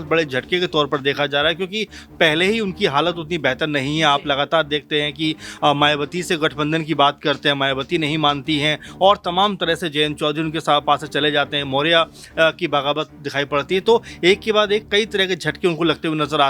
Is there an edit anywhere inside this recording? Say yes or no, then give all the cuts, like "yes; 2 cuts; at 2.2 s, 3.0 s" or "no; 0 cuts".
no; 0 cuts